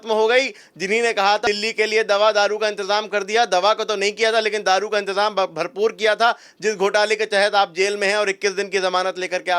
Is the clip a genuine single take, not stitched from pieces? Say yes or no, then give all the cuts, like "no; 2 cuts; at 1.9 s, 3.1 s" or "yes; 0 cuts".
no; 1 cut; at 1.4 s